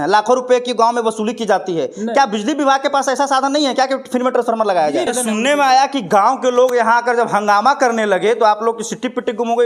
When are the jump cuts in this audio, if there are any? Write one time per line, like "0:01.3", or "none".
0:05.1

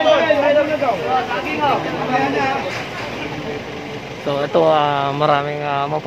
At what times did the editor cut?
0:03.9

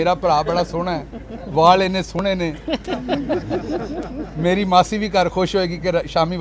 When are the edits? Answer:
none

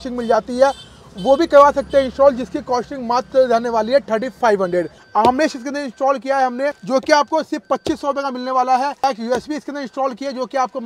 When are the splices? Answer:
0:05.0
0:06.8
0:09.0

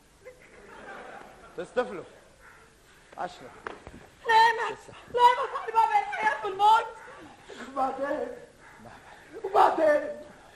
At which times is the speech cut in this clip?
0:07.9

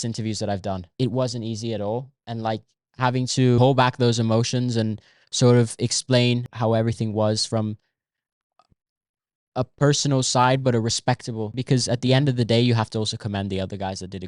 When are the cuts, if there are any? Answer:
0:00.9
0:03.6
0:06.5
0:11.6

